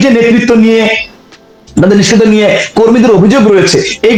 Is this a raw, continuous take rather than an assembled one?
yes; 0 cuts

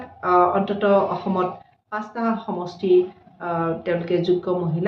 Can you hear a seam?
no; 0 cuts

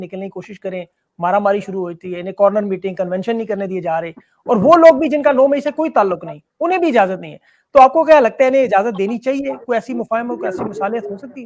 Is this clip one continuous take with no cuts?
yes; 0 cuts

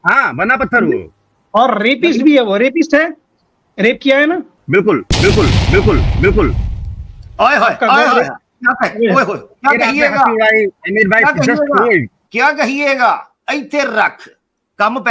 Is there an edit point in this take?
no; 0 cuts

